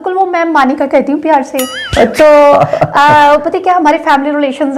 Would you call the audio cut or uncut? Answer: uncut